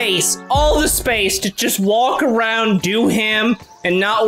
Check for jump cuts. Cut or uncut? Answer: uncut